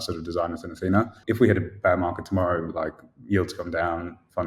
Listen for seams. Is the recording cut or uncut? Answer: cut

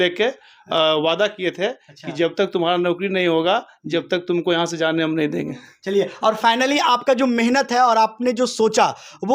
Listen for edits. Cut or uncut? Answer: uncut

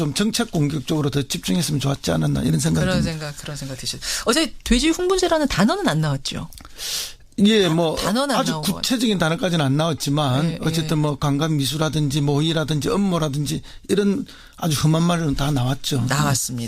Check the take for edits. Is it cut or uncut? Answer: cut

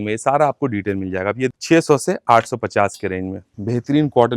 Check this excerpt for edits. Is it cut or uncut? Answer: cut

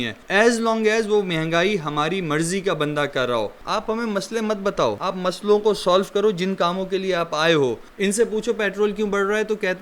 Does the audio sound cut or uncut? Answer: cut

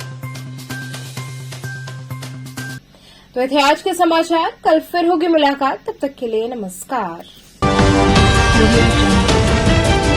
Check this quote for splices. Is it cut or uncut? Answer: uncut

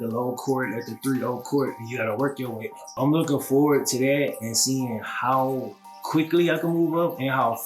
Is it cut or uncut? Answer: cut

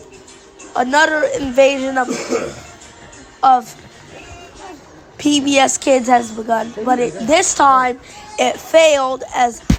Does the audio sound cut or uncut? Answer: uncut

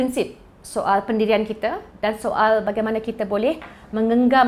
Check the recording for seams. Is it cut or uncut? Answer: uncut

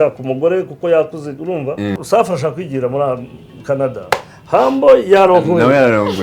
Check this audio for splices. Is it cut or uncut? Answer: cut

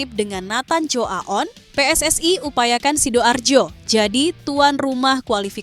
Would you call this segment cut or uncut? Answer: cut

